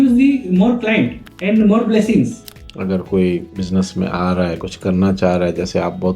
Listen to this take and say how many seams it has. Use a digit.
3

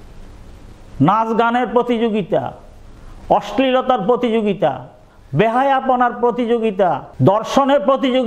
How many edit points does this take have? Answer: 1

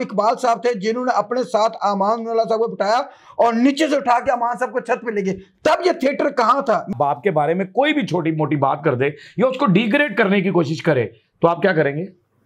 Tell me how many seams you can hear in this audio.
1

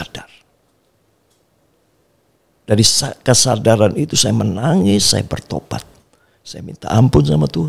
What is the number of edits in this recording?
0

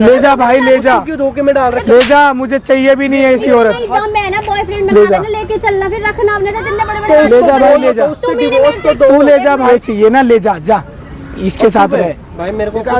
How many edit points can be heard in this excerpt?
1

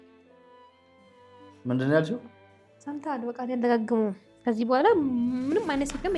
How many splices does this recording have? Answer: 1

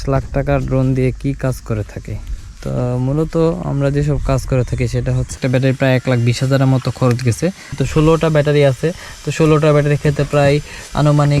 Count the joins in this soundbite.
2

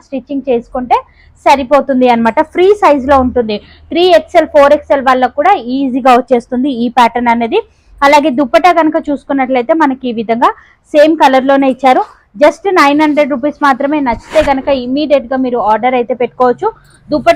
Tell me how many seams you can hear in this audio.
0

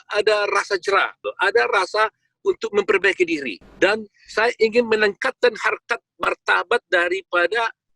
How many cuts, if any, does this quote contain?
2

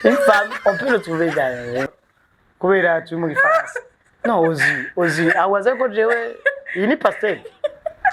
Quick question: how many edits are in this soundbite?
1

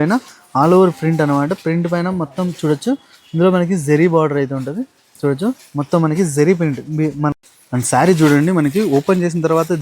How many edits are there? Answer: 1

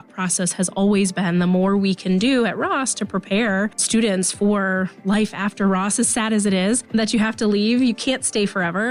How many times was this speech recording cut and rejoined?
2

